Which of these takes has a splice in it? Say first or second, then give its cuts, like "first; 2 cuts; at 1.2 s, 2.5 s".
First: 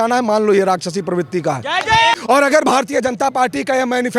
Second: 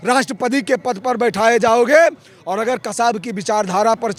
first; 1 cut; at 2.2 s